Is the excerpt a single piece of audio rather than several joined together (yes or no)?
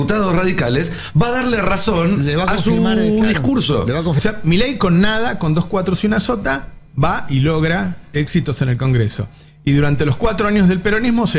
no